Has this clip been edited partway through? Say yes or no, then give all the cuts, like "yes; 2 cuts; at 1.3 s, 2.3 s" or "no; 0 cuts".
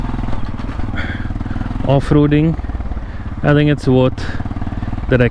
no; 0 cuts